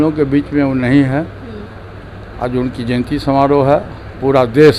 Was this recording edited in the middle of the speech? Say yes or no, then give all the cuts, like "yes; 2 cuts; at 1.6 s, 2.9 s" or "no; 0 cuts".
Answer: no; 0 cuts